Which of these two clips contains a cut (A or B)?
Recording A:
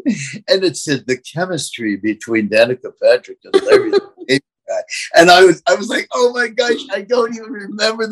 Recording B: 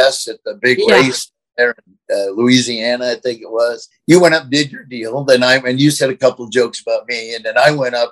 B